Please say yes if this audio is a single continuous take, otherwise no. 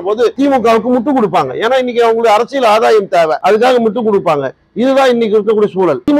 yes